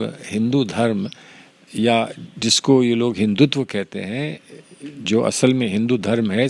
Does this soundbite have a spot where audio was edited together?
no; 0 cuts

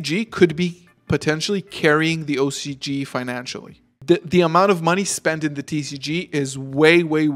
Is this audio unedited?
yes; 0 cuts

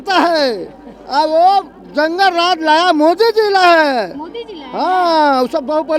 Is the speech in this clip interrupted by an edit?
no; 0 cuts

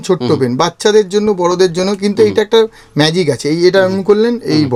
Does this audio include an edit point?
no; 0 cuts

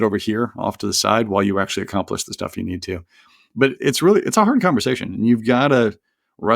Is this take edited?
yes; 1 cut; at 3.7 s

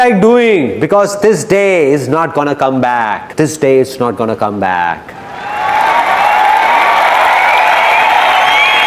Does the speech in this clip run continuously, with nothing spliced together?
yes; 0 cuts

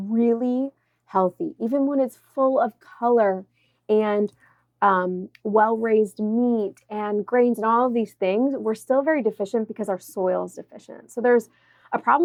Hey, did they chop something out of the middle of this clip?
no; 0 cuts

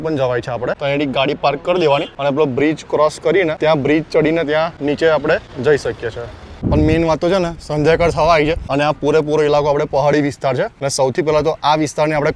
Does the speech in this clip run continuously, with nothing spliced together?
no; 8 cuts; at 0.8 s, 2.1 s, 3.6 s, 4.7 s, 5.5 s, 6.6 s, 8.6 s, 10.8 s

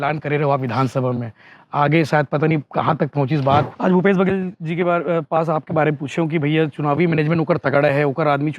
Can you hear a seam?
yes; 1 cut; at 3.7 s

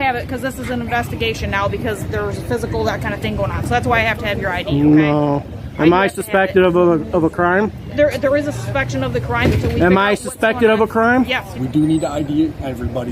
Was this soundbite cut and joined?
yes; 1 cut; at 11.6 s

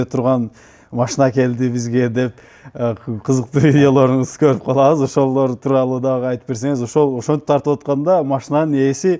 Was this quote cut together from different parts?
no; 0 cuts

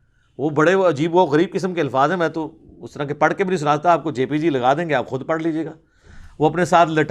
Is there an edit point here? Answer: no; 0 cuts

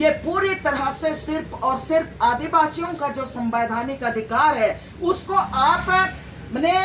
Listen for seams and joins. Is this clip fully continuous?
yes; 0 cuts

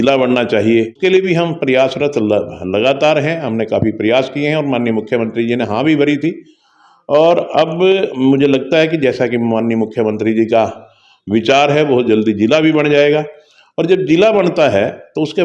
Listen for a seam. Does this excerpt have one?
no; 0 cuts

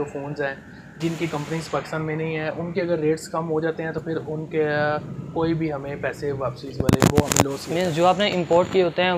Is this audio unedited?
yes; 0 cuts

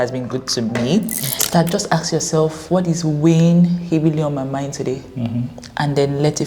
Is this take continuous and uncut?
no; 1 cut; at 1.4 s

